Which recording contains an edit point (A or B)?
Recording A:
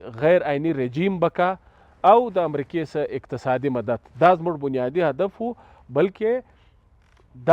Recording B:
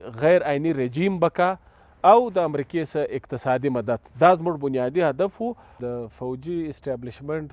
B